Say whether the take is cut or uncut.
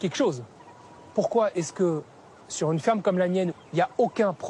cut